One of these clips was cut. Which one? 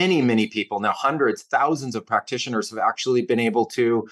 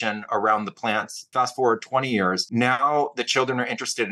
second; 2 cuts; at 1.2 s, 2.4 s

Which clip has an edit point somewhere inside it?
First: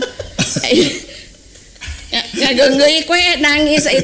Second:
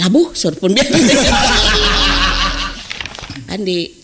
second; 1 cut; at 2.8 s

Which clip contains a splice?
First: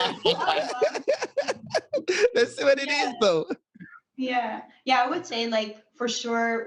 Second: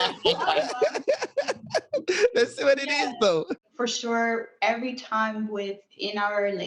second; 1 cut; at 3.6 s

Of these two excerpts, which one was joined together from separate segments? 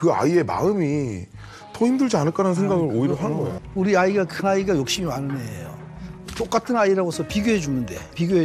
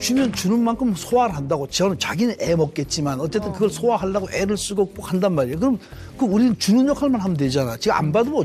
first; 1 cut; at 3.6 s

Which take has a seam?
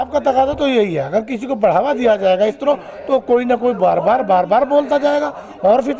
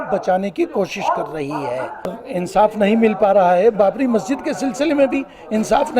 second; 1 cut; at 2.2 s

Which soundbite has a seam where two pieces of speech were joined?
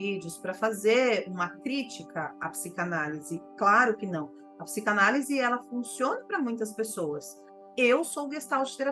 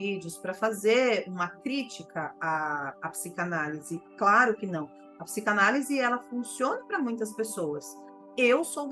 first; 1 cut; at 2.4 s

